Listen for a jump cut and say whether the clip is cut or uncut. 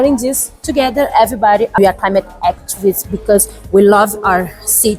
cut